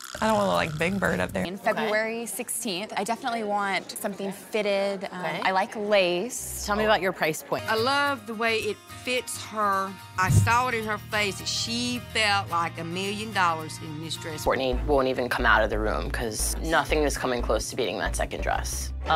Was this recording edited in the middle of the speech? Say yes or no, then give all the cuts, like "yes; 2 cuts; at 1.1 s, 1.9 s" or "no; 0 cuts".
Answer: yes; 3 cuts; at 1.4 s, 7.6 s, 14.3 s